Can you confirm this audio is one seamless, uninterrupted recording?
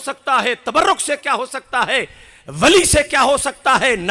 yes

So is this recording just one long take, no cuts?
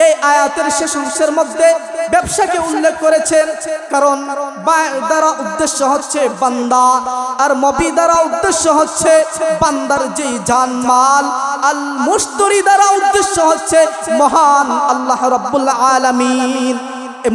yes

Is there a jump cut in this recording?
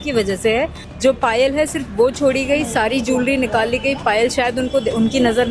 yes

